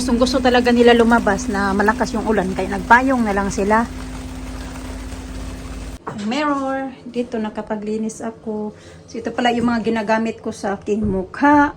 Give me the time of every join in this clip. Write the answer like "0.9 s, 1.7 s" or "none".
6.0 s